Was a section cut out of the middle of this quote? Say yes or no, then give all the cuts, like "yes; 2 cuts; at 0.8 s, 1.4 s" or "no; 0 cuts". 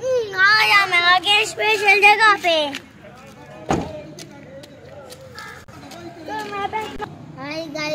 no; 0 cuts